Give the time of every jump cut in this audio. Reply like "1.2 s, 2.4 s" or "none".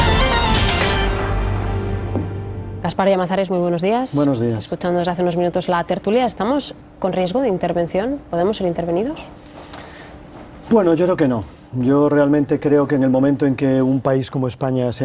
none